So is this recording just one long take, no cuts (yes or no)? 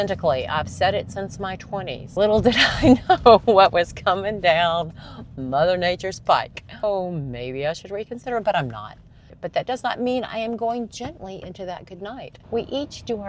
no